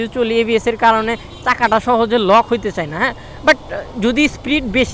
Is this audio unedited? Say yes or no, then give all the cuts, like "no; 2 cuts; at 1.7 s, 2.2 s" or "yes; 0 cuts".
yes; 0 cuts